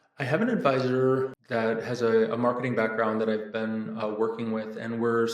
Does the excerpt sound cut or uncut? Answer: cut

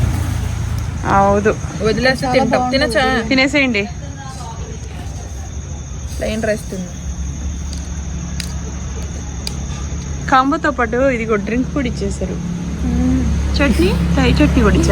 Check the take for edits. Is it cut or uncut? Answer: uncut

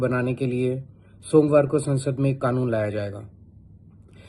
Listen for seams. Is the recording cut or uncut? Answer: uncut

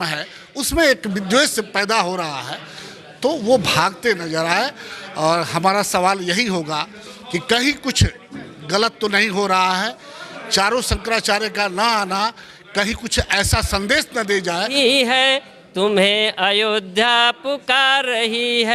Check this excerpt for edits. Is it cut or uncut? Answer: cut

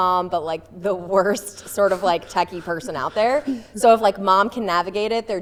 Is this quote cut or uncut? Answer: uncut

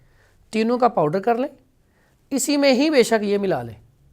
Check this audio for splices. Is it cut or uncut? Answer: uncut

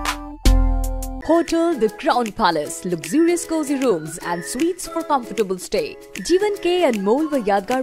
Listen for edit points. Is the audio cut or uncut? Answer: cut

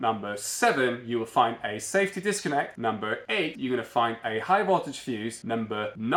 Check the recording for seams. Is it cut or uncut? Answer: uncut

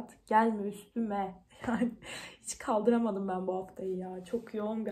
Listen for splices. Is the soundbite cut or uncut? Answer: uncut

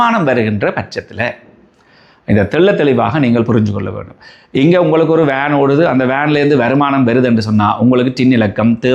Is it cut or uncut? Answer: uncut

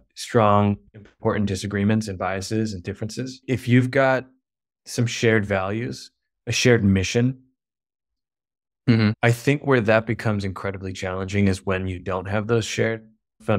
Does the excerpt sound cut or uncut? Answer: cut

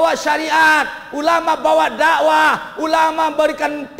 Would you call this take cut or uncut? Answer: uncut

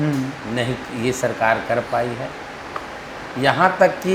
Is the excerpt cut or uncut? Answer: uncut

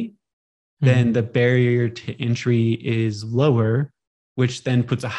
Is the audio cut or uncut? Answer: uncut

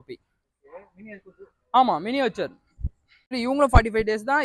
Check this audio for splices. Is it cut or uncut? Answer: cut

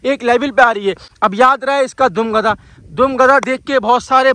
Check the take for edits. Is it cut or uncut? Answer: uncut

